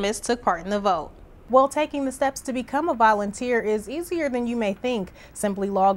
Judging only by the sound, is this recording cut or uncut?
cut